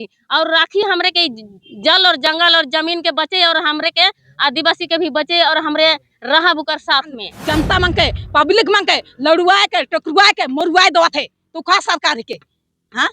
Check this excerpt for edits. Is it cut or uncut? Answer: cut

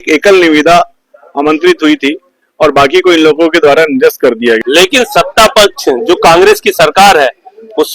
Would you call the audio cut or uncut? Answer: cut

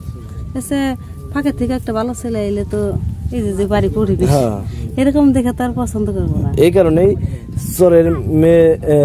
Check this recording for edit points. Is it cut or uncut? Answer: uncut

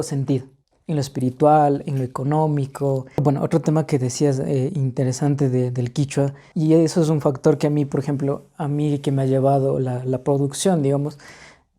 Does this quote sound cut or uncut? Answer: cut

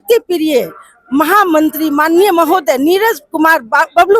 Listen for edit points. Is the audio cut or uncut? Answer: uncut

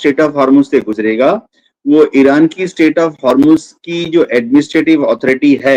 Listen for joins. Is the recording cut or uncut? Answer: uncut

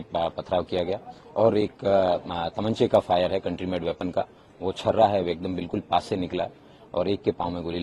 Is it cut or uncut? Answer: uncut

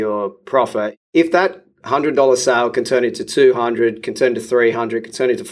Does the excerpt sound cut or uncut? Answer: cut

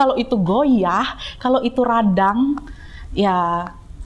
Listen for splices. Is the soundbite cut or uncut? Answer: uncut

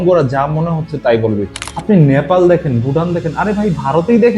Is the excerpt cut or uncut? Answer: cut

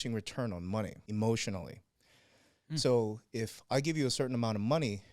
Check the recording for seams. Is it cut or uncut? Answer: cut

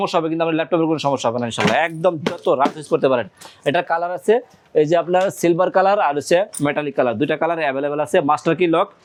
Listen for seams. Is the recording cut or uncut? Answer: uncut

